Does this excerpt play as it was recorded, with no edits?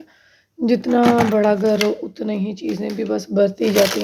yes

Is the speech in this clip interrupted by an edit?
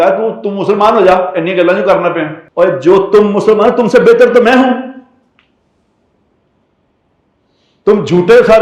yes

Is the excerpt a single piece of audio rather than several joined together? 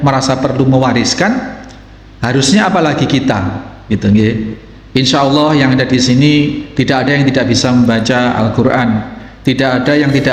yes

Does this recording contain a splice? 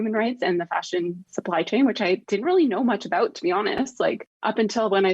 yes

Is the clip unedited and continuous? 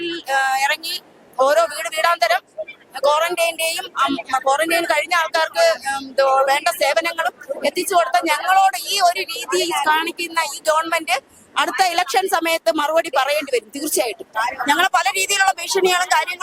no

